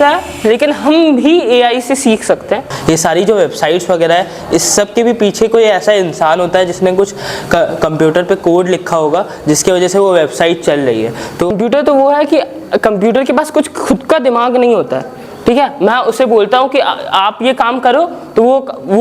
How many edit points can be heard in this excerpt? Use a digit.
2